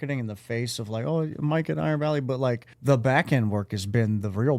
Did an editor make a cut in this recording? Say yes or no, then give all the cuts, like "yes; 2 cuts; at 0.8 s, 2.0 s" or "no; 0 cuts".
yes; 1 cut; at 2.7 s